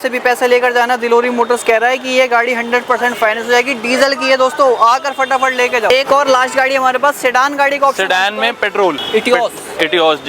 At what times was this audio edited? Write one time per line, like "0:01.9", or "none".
none